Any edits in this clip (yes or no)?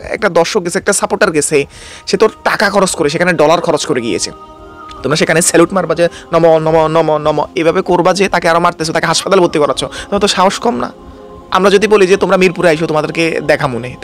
no